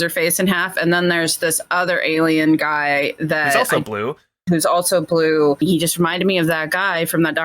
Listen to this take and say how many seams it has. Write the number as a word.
one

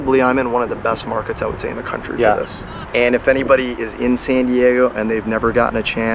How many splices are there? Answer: one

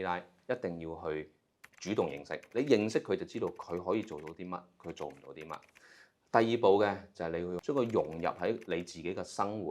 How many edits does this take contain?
two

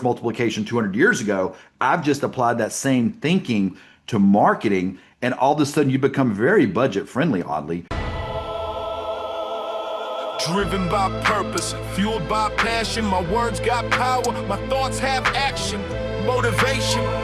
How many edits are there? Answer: one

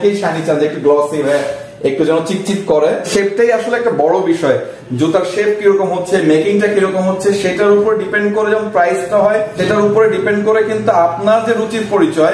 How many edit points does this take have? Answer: two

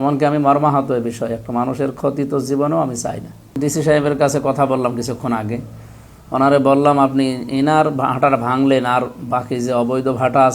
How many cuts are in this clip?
one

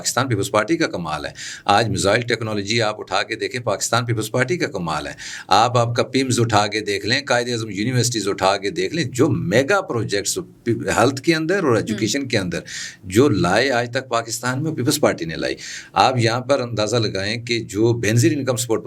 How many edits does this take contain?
zero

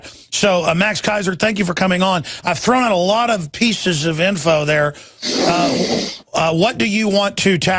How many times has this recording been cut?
one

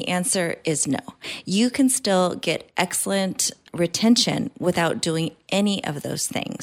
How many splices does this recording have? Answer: zero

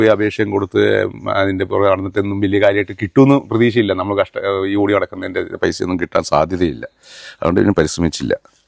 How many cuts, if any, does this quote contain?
zero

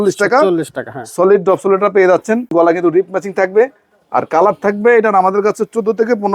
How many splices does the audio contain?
one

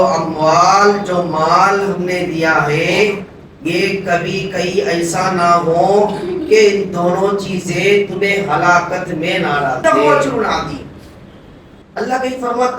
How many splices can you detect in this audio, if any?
one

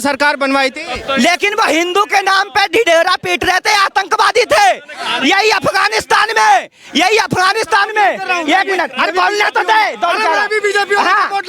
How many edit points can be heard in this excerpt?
zero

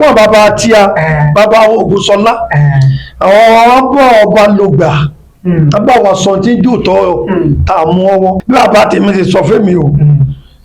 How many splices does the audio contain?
one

